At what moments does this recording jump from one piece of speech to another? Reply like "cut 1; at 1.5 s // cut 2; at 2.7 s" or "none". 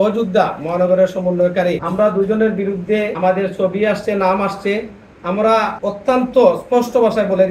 cut 1; at 1.8 s // cut 2; at 3.1 s // cut 3; at 5.8 s